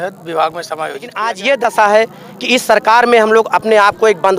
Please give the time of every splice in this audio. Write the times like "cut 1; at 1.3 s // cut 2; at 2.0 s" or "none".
cut 1; at 1.3 s